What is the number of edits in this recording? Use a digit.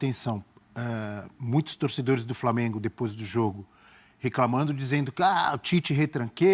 0